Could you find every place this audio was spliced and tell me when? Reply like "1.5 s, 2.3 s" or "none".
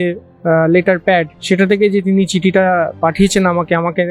1.3 s

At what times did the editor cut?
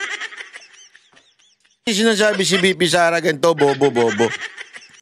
1.9 s

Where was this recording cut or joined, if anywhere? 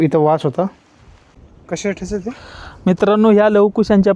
1.2 s

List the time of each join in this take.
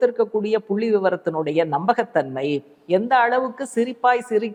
none

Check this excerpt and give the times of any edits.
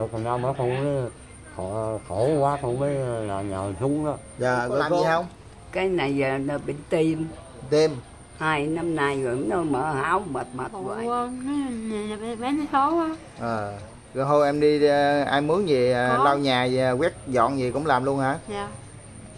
5.0 s, 10.8 s

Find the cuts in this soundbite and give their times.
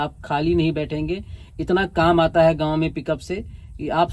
none

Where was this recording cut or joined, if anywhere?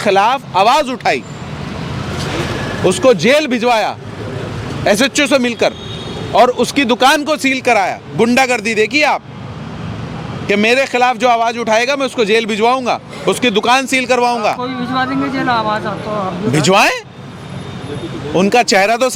none

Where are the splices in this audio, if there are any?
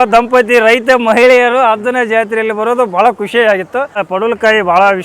4.0 s

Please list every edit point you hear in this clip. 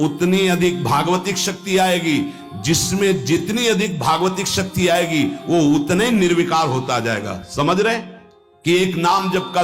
8.5 s

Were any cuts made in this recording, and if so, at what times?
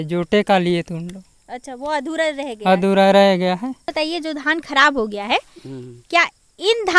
3.9 s

